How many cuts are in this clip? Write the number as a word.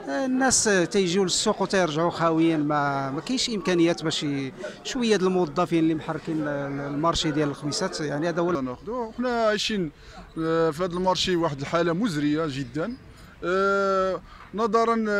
one